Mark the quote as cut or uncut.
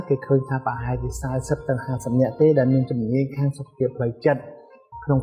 uncut